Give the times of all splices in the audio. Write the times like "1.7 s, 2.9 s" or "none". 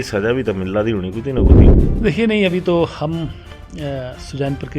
1.6 s